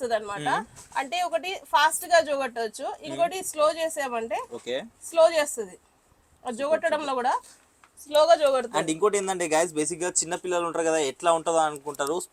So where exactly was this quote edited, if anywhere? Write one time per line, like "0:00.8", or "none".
none